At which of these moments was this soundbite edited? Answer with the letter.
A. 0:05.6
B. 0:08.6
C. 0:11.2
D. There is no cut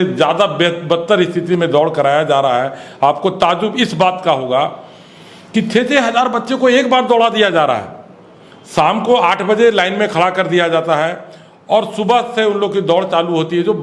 D